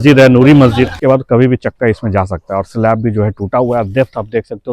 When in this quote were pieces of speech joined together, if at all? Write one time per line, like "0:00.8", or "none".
0:01.0